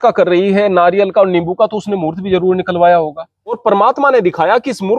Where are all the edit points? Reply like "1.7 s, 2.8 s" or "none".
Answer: 3.6 s